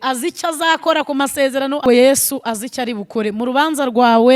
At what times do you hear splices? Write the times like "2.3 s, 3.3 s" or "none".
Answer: 1.8 s